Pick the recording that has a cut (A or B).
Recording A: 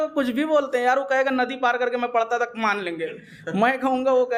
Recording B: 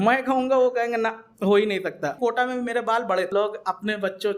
B